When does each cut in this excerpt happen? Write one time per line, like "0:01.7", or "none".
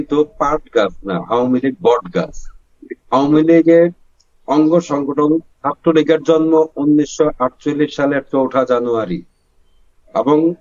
none